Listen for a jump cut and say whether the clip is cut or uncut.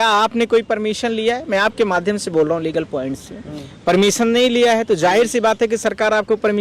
uncut